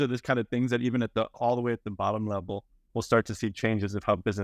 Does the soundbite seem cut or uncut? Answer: uncut